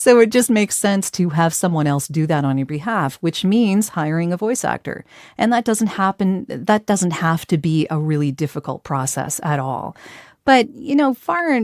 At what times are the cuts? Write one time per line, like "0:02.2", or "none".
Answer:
none